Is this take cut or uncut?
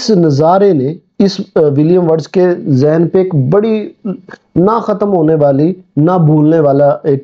cut